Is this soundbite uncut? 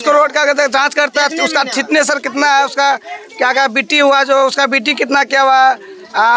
yes; 0 cuts

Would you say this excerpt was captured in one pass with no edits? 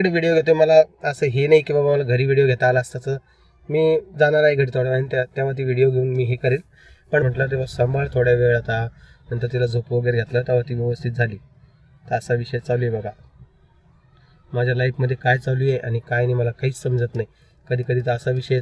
no; 1 cut; at 7.2 s

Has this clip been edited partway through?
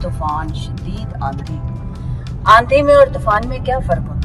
no; 0 cuts

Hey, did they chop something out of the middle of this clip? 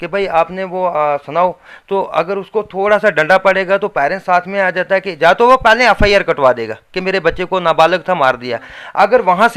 no; 0 cuts

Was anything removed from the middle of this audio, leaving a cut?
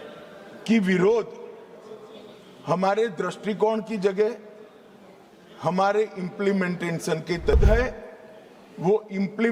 yes; 1 cut; at 7.5 s

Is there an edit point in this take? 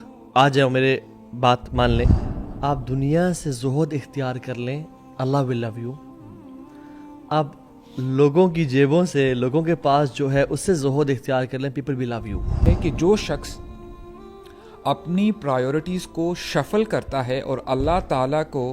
yes; 2 cuts; at 2.1 s, 12.6 s

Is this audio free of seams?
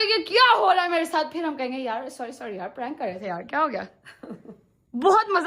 yes; 0 cuts

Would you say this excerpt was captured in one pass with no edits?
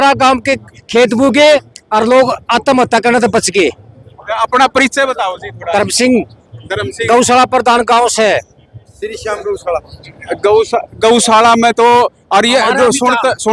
yes; 0 cuts

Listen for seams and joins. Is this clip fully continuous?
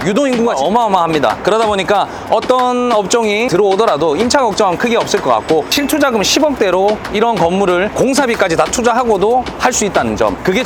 yes; 0 cuts

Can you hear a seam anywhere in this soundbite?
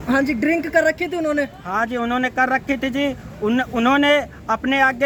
no; 0 cuts

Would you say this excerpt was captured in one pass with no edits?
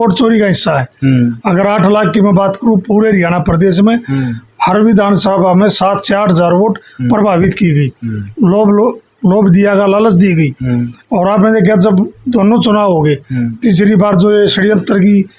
yes; 0 cuts

